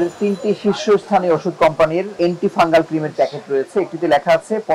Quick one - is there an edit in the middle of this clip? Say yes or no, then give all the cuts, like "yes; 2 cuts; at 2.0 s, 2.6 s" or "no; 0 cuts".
yes; 2 cuts; at 2.2 s, 3.1 s